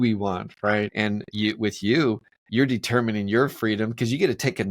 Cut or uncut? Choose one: cut